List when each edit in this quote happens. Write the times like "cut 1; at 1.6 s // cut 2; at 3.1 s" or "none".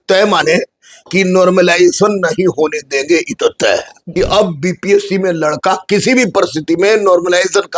cut 1; at 4.0 s